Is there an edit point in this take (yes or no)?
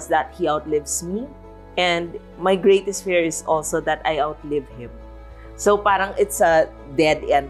no